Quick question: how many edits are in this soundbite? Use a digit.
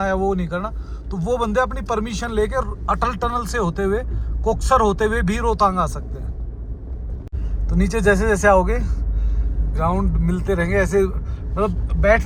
0